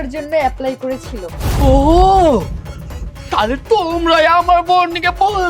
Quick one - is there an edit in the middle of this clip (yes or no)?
yes